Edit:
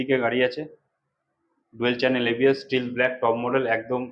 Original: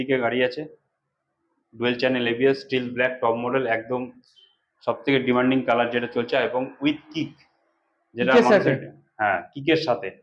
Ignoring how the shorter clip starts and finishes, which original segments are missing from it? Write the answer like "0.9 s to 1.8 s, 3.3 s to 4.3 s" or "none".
none